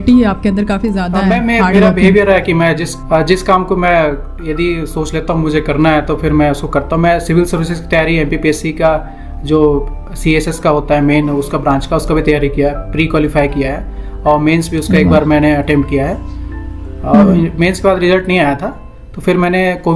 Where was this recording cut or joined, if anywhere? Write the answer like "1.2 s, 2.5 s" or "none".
none